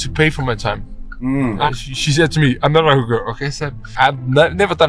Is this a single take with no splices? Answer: no; 2 cuts; at 1.7 s, 3.9 s

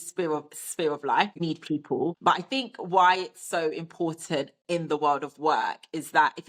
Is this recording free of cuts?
no; 1 cut; at 1.7 s

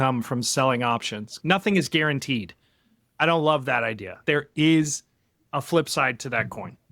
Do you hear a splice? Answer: yes; 2 cuts; at 1.3 s, 4.2 s

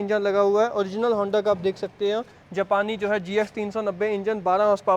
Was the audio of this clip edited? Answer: no; 0 cuts

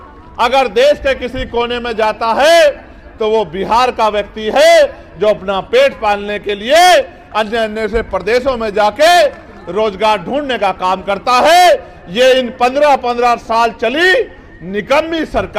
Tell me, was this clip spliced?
no; 0 cuts

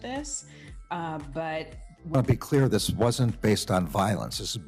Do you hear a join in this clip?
yes; 1 cut; at 2.1 s

